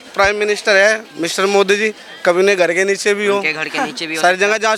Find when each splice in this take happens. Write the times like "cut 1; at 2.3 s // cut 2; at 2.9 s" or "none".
none